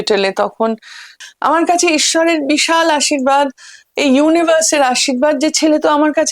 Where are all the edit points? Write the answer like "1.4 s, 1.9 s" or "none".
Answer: 1.2 s